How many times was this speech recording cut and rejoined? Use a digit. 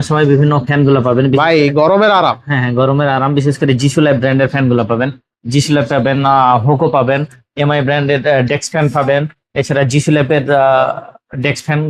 0